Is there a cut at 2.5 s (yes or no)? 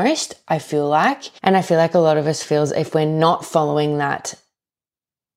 no